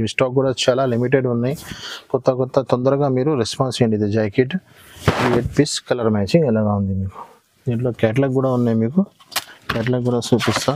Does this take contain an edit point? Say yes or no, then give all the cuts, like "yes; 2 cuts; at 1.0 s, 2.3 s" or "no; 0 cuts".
no; 0 cuts